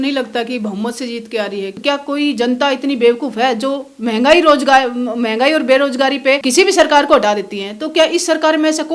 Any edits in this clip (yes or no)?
yes